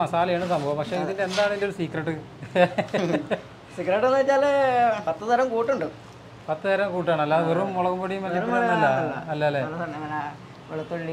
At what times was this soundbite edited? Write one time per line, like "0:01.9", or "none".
none